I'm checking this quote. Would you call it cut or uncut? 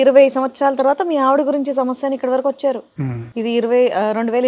uncut